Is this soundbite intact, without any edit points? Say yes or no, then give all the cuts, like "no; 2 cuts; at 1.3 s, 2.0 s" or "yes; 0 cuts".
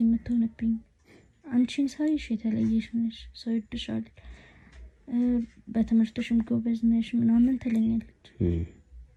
yes; 0 cuts